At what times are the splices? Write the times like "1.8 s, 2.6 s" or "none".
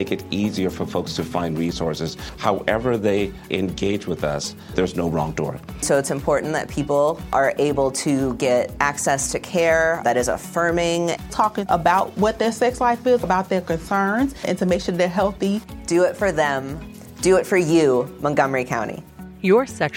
none